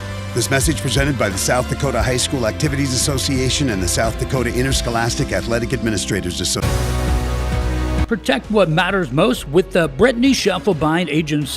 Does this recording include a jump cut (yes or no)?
yes